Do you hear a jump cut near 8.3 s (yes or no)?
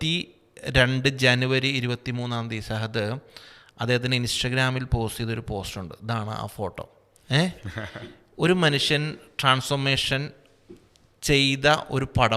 no